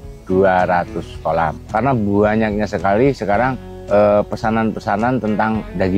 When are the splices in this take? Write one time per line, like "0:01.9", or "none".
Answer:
0:01.6